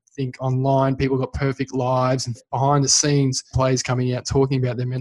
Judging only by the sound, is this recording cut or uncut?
cut